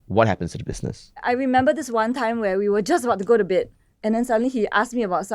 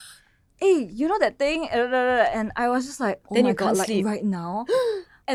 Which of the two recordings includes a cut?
first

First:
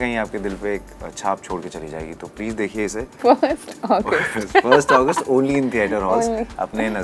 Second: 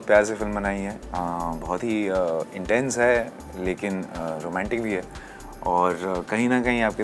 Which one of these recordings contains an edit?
first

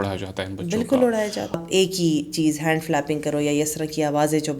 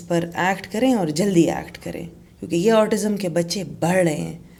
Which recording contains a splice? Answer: first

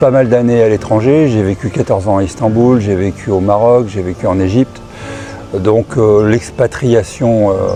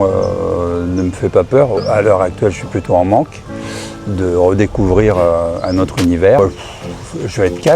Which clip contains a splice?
second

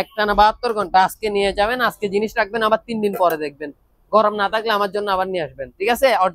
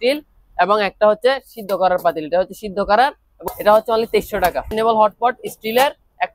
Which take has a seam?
second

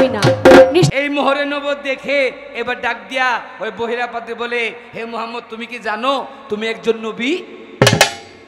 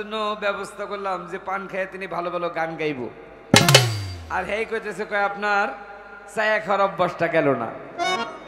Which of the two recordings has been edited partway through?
first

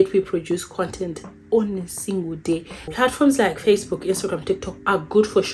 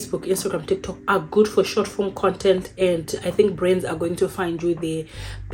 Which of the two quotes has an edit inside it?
first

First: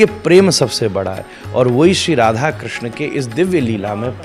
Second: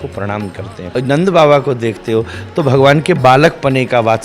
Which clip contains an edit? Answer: second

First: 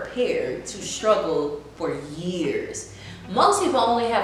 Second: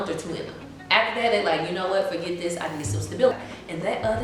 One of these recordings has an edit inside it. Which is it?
second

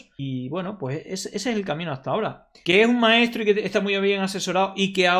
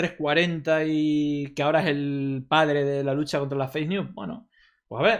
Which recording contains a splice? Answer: first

